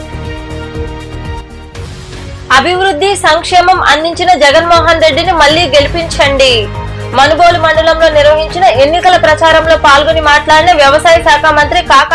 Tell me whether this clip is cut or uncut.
cut